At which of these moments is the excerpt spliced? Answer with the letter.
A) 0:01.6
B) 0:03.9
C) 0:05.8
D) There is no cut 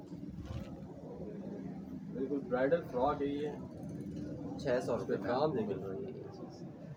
D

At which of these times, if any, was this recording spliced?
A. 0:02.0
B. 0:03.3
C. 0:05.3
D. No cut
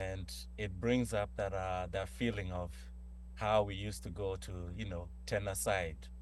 D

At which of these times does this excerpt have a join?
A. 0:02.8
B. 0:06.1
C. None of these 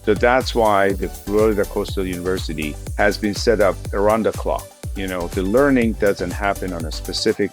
A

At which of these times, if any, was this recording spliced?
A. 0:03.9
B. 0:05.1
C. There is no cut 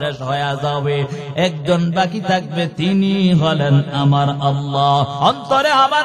B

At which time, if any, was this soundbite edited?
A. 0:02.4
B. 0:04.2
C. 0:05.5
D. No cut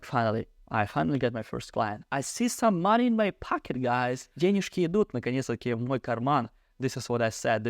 D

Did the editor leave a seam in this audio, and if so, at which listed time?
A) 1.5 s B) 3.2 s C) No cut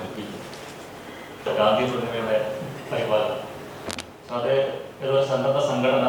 A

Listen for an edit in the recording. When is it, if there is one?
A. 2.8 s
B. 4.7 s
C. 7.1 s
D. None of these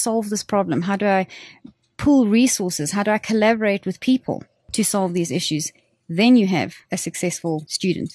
C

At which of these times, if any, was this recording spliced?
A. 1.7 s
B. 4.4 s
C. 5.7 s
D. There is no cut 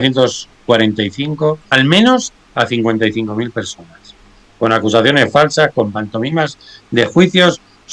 A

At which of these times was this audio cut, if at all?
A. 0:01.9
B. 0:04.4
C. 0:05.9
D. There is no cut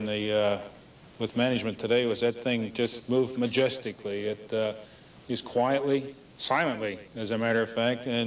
D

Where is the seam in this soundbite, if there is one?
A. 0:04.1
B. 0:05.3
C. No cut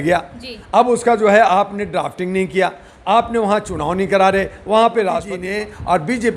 B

